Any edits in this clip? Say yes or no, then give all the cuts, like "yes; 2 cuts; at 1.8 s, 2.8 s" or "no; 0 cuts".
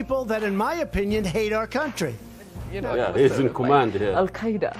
no; 0 cuts